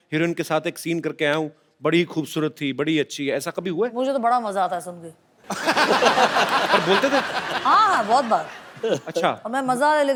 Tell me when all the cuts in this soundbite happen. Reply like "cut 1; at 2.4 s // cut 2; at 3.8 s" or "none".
none